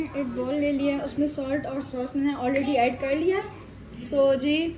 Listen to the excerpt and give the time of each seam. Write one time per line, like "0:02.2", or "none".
none